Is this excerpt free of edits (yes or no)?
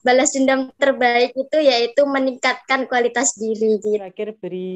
no